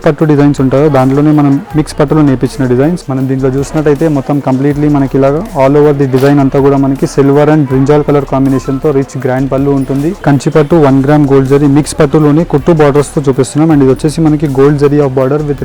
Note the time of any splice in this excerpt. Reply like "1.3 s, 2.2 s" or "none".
3.0 s, 10.2 s

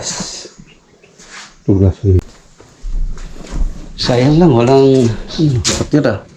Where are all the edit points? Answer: 2.2 s

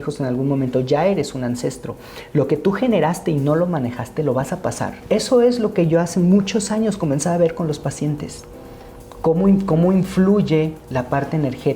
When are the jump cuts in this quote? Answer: 5.0 s

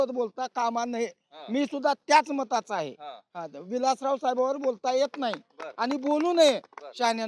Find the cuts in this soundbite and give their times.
none

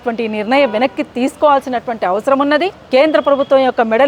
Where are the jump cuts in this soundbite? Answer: 2.8 s

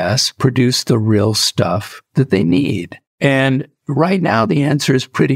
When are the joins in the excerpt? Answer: none

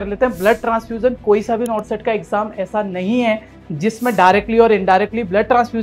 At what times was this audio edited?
none

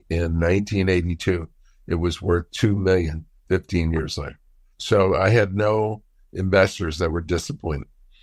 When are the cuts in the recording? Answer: none

